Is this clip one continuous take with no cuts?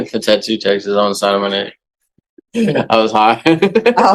no; 1 cut; at 2.3 s

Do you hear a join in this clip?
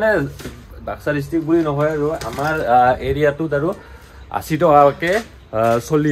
no; 0 cuts

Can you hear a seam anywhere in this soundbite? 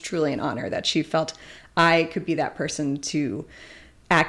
no; 0 cuts

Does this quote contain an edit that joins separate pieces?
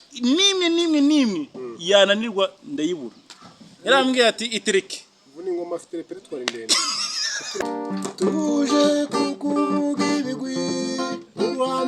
yes; 1 cut; at 7.6 s

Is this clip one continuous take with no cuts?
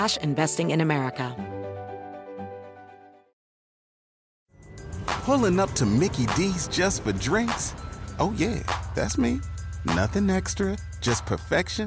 no; 1 cut; at 1.3 s

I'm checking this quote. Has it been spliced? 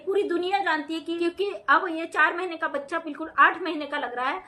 yes; 1 cut; at 1.1 s

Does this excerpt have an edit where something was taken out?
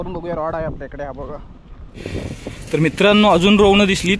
yes; 1 cut; at 2.0 s

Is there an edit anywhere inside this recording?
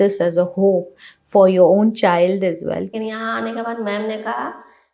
yes; 1 cut; at 2.9 s

